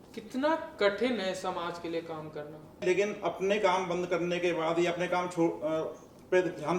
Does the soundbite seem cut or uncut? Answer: cut